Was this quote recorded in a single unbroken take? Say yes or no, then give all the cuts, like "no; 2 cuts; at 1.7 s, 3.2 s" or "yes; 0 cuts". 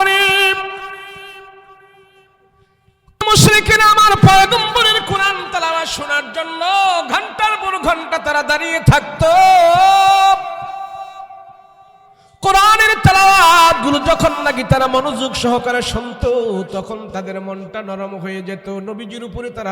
no; 1 cut; at 3.2 s